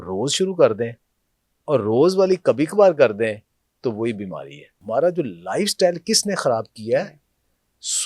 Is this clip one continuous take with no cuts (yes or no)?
no